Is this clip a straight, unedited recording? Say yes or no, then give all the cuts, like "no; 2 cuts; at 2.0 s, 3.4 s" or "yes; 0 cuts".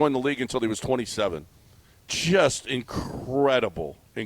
yes; 0 cuts